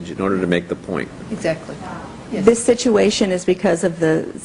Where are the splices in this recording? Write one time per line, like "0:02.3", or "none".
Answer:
none